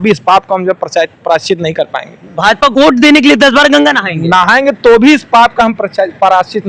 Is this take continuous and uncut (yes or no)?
yes